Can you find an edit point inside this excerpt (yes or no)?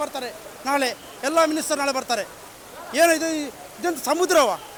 no